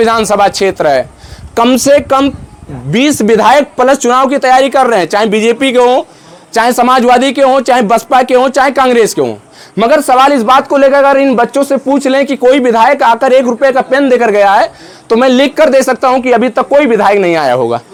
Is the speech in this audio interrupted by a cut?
no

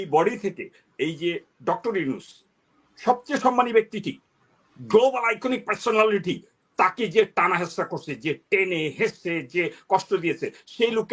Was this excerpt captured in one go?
yes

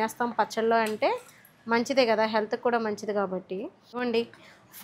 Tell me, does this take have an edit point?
yes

